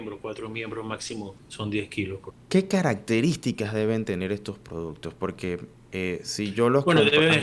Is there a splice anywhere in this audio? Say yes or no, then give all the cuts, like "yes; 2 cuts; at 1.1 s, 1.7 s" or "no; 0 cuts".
yes; 3 cuts; at 1.4 s, 2.3 s, 5.8 s